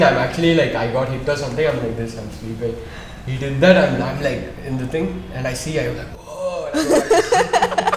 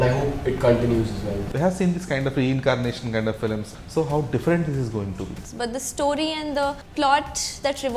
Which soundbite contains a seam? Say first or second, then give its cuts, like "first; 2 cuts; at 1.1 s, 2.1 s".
second; 4 cuts; at 1.5 s, 3.7 s, 5.4 s, 6.8 s